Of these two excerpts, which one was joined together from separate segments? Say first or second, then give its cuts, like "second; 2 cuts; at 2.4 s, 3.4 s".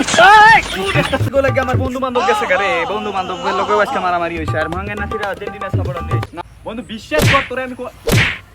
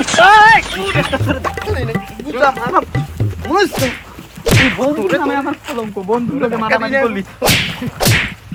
first; 2 cuts; at 1.2 s, 6.3 s